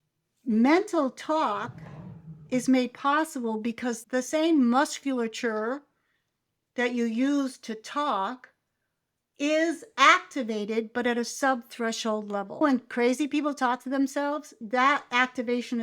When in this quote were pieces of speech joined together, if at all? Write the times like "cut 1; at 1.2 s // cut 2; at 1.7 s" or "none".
cut 1; at 4.0 s // cut 2; at 12.6 s // cut 3; at 14.6 s